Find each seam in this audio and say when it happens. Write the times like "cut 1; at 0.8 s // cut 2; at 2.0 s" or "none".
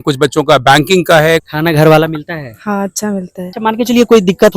cut 1; at 1.5 s // cut 2; at 3.5 s